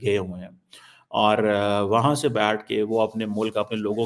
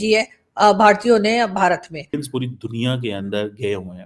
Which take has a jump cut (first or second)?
second